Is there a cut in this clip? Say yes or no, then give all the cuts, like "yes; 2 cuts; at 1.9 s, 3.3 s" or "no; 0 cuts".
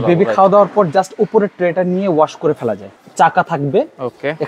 yes; 1 cut; at 2.9 s